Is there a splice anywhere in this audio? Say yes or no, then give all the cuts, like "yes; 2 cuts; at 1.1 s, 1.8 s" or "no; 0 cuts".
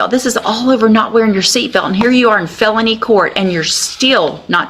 no; 0 cuts